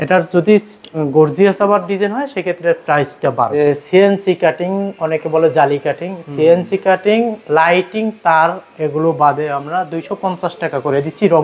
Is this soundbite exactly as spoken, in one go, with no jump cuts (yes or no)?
no